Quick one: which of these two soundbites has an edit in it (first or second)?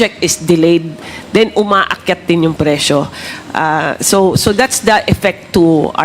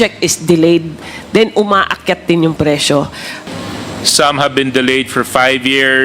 second